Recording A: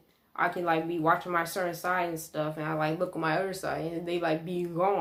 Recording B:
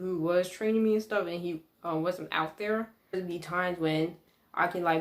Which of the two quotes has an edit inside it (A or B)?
B